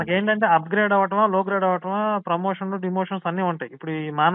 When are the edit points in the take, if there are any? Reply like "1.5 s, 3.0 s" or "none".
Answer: none